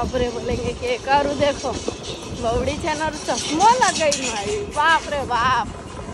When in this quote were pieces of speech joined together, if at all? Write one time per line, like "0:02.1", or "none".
none